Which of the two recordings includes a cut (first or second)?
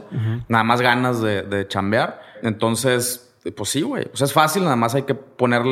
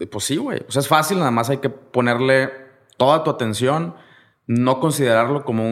first